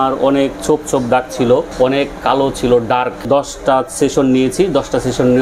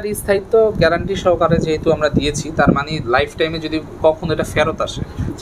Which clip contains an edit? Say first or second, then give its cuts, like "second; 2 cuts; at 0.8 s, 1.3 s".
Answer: first; 2 cuts; at 1.7 s, 3.2 s